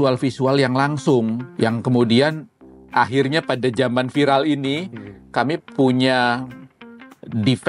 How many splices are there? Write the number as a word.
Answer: one